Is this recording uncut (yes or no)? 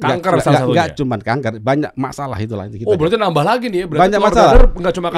yes